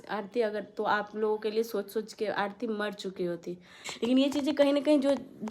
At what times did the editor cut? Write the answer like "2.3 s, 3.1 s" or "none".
3.8 s